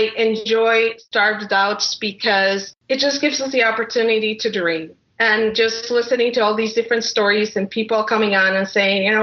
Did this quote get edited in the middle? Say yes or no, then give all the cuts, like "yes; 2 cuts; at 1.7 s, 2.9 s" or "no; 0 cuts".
yes; 2 cuts; at 1.0 s, 2.7 s